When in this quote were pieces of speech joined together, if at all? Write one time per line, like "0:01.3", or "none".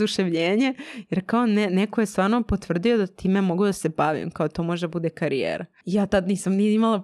0:05.7